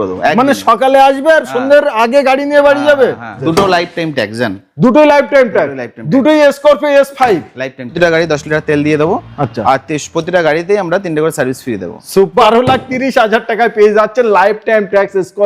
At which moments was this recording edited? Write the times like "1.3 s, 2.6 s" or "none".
3.4 s, 7.9 s, 12.3 s